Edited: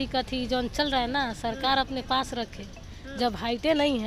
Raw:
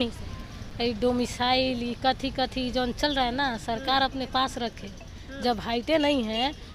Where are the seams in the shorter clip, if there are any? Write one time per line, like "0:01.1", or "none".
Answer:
none